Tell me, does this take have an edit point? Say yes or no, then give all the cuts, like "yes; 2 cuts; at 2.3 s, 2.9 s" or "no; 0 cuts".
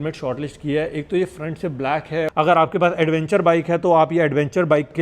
yes; 1 cut; at 2.3 s